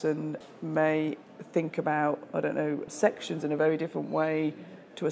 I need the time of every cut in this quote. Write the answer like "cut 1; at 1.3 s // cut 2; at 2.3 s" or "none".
cut 1; at 2.9 s